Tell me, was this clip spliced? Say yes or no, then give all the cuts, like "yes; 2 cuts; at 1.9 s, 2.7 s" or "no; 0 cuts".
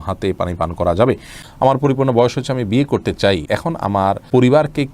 yes; 2 cuts; at 1.4 s, 3.9 s